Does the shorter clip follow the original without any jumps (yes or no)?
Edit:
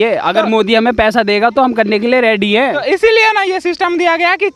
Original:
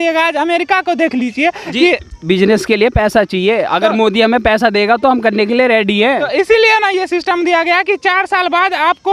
yes